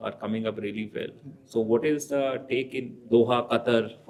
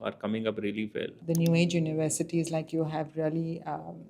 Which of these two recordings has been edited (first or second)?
second